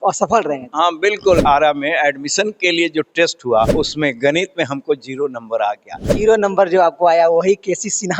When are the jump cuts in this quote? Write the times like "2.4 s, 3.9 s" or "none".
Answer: 1.4 s, 3.7 s, 6.1 s